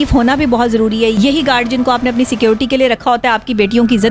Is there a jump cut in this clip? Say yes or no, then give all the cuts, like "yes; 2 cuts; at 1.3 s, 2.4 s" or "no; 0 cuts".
yes; 1 cut; at 1.1 s